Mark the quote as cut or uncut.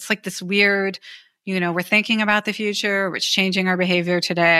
uncut